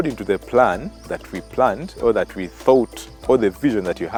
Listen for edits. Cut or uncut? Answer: uncut